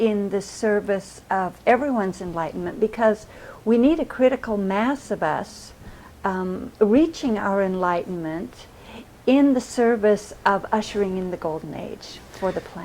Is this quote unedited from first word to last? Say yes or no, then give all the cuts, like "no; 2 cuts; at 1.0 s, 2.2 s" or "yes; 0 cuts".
yes; 0 cuts